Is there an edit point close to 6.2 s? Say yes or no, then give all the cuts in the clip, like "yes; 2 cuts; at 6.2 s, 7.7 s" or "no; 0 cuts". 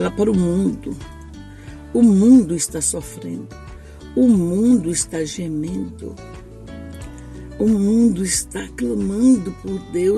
yes; 2 cuts; at 6.2 s, 7.6 s